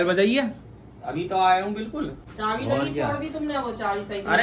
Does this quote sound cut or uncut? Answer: cut